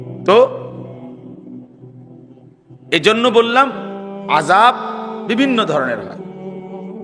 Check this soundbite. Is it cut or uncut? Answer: cut